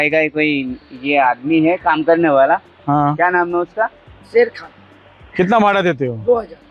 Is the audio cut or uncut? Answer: uncut